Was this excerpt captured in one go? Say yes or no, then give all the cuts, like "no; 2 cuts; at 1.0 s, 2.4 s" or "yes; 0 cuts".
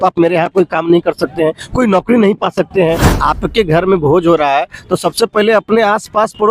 no; 1 cut; at 3.1 s